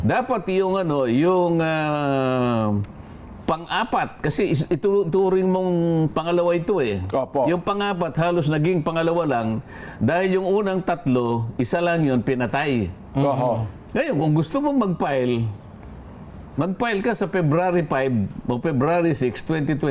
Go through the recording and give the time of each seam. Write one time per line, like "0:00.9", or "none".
none

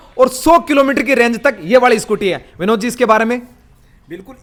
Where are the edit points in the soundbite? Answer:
none

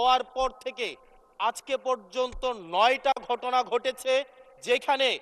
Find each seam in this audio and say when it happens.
none

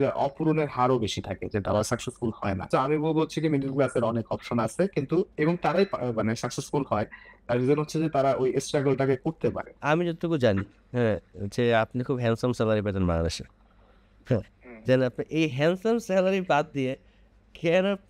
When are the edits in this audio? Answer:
0:02.6
0:09.7

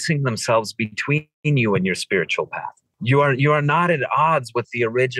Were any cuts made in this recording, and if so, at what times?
0:02.9

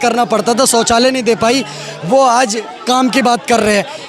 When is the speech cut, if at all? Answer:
none

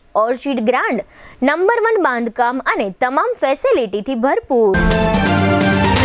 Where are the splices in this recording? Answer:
0:04.7

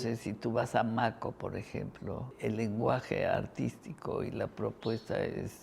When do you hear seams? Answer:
0:02.3

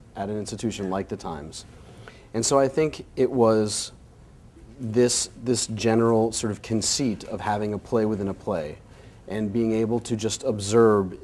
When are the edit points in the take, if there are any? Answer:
none

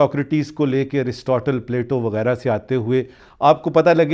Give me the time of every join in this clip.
0:03.2

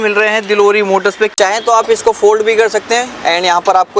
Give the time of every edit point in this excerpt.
0:01.3

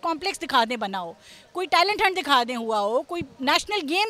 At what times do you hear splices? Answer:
none

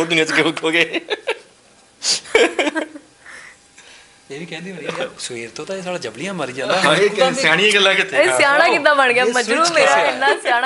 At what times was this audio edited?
none

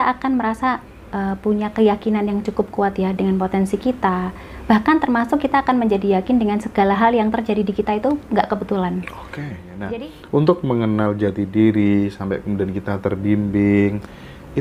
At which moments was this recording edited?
0:09.7

